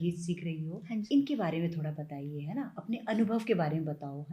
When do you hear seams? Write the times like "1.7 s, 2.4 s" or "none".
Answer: 1.1 s